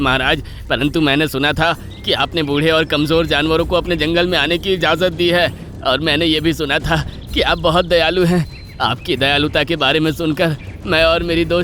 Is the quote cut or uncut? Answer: uncut